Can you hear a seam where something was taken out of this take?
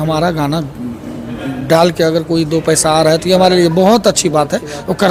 no; 0 cuts

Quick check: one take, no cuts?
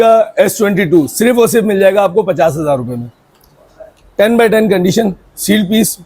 yes; 0 cuts

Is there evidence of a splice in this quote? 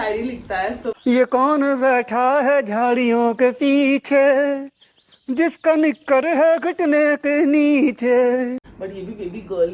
yes; 1 cut; at 8.7 s

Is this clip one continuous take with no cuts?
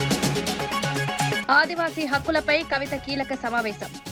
yes; 0 cuts

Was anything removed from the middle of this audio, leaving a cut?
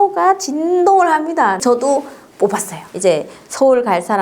yes; 2 cuts; at 1.6 s, 2.8 s

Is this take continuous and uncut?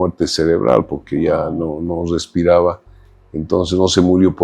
yes; 0 cuts

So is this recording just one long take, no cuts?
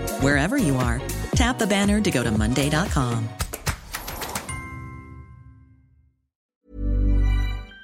no; 1 cut; at 6.5 s

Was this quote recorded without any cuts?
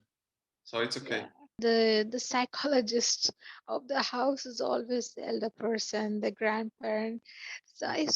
no; 1 cut; at 1.6 s

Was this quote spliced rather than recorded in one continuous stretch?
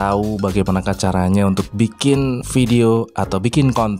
yes; 1 cut; at 2.4 s

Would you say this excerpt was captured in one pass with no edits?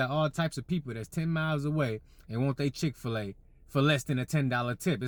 yes; 0 cuts

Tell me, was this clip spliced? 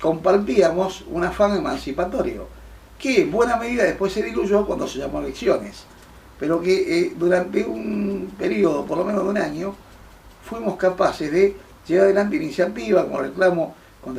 yes; 1 cut; at 8.8 s

